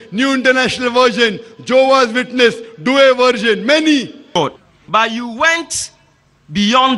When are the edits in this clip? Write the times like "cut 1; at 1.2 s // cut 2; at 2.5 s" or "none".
cut 1; at 4.4 s